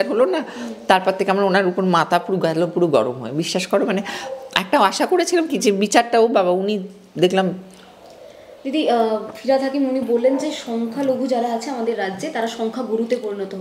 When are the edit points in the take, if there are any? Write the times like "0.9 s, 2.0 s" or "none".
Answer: none